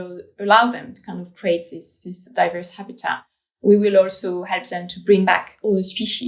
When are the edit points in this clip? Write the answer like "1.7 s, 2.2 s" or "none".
5.3 s